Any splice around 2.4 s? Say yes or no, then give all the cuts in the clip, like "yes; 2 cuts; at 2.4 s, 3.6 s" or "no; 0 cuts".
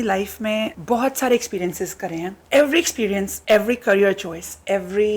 yes; 1 cut; at 2.4 s